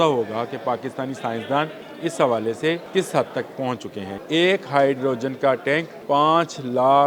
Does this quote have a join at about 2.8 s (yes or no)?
yes